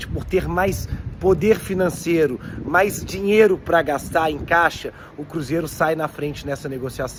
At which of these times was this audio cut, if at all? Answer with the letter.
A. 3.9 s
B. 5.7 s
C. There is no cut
C